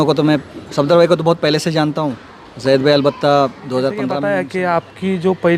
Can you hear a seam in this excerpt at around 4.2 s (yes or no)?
yes